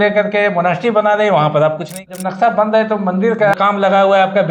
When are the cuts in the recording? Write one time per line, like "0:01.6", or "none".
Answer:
0:02.1
0:03.6